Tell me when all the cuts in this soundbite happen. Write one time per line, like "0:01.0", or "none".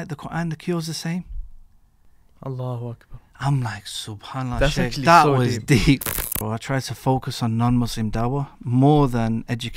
0:06.3